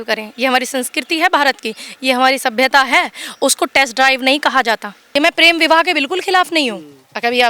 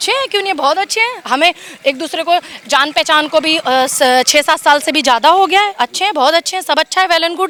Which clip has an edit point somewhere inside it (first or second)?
first